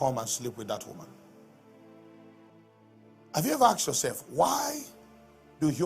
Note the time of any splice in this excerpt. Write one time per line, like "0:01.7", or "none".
0:02.5

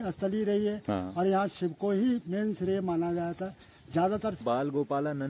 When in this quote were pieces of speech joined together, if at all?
0:04.4

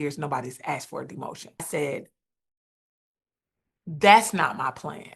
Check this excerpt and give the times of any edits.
0:01.7

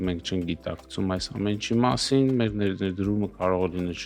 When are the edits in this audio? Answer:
none

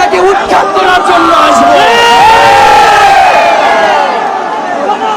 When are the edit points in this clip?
none

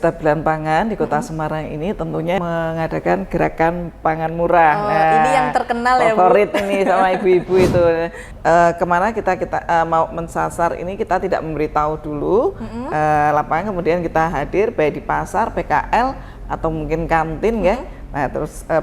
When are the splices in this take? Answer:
0:02.4
0:08.2

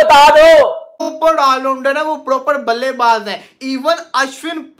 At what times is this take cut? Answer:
0:01.2

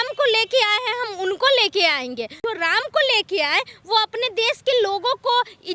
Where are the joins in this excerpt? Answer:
0:02.4

